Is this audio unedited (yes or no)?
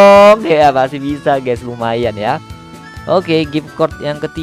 yes